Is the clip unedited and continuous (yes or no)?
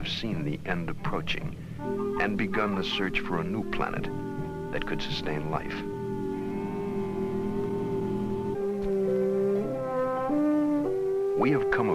no